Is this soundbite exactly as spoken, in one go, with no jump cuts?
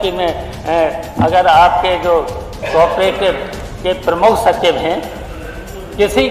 yes; 0 cuts

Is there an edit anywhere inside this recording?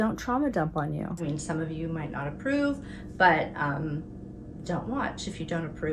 yes; 1 cut; at 1.2 s

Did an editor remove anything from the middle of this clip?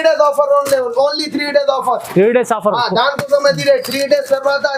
no; 0 cuts

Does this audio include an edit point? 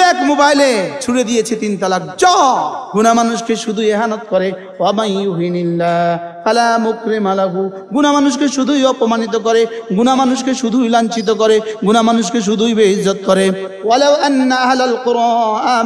yes; 3 cuts; at 1.0 s, 2.8 s, 13.7 s

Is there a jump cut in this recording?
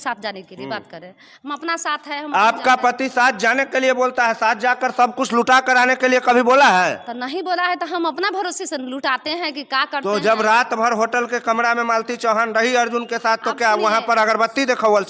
no; 0 cuts

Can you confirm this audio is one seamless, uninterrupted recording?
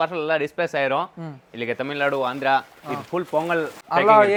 yes; 0 cuts

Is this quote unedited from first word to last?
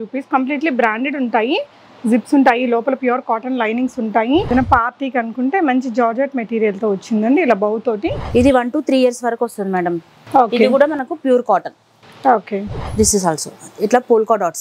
no; 2 cuts; at 4.5 s, 8.2 s

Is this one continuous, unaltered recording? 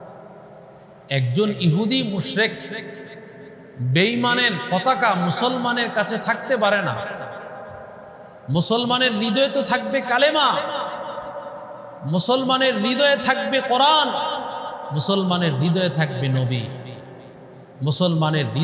yes; 0 cuts

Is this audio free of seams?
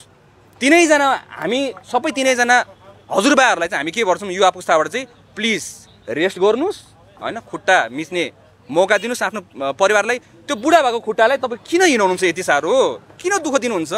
yes; 0 cuts

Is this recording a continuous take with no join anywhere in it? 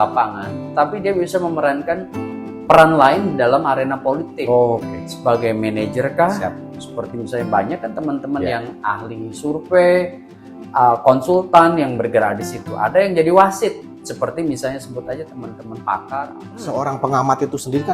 no; 1 cut; at 16.6 s

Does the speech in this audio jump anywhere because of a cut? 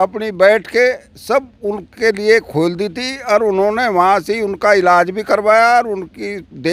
no; 0 cuts

